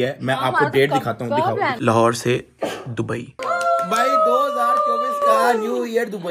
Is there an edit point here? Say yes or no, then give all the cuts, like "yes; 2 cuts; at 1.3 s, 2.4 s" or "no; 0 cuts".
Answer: yes; 2 cuts; at 1.7 s, 3.4 s